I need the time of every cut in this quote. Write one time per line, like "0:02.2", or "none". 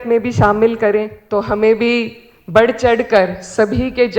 0:01.2